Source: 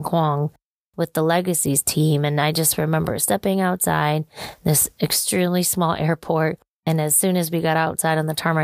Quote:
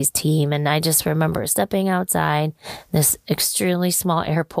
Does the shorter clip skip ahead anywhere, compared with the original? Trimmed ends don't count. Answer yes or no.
no